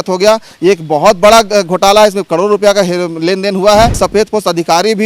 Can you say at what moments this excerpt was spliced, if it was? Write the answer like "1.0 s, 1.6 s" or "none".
4.0 s